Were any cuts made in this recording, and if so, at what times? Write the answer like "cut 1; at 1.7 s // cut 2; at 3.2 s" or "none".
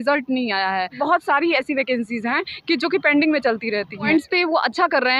cut 1; at 1.0 s // cut 2; at 4.1 s